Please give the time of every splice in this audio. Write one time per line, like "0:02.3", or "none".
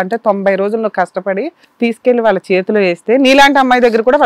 0:01.6